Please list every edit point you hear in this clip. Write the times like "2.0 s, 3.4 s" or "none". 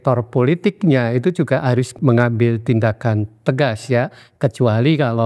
1.9 s